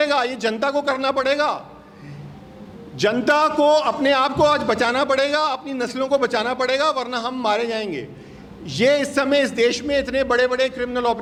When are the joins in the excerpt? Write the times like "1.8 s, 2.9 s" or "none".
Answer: none